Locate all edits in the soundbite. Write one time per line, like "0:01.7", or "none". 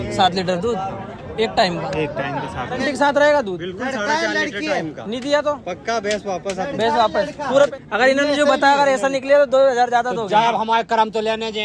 0:02.8
0:07.7

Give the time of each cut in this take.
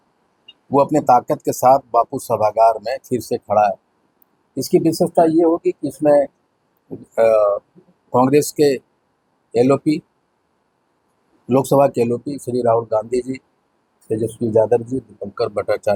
none

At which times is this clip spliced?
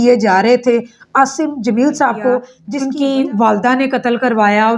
0:02.6

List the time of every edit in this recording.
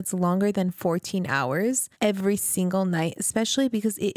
0:01.9

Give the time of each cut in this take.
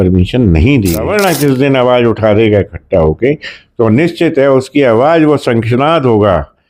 0:01.0

